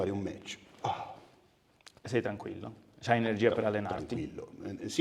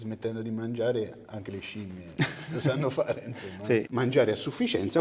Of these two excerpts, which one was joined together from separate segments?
second; 2 cuts; at 1.2 s, 3.9 s

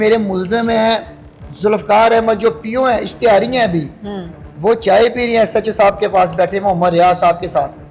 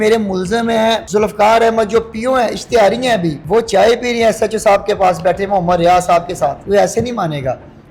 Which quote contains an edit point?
second; 3 cuts; at 1.0 s, 3.4 s, 6.6 s

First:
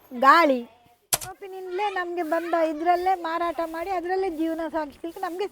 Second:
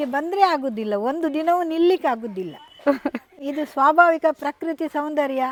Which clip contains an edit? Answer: first; 1 cut; at 1.3 s

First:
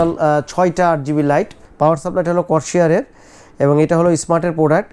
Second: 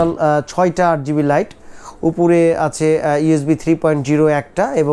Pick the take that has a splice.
first; 1 cut; at 1.6 s

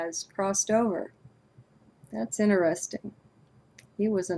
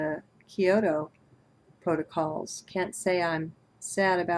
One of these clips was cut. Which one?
first; 1 cut; at 2.5 s

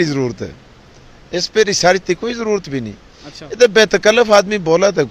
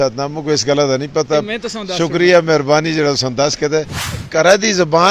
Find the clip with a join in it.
second; 1 cut; at 4.1 s

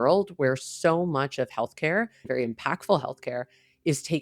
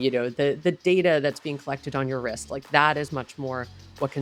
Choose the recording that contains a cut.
first; 1 cut; at 2.3 s

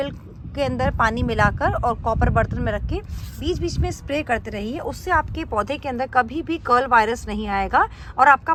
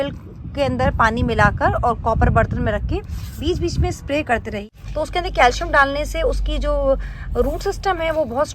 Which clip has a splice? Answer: second; 1 cut; at 4.6 s

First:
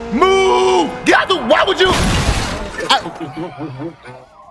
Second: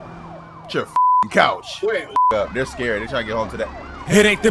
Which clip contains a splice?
second; 1 cut; at 2.3 s

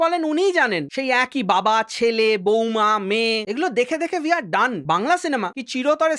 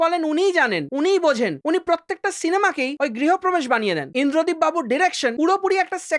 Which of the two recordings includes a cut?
first; 2 cuts; at 0.9 s, 4.8 s

